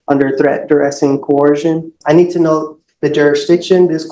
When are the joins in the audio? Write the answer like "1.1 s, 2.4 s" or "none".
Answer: 1.9 s